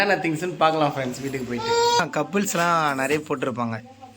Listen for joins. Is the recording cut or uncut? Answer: cut